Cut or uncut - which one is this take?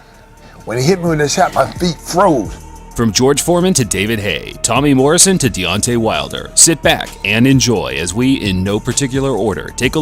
cut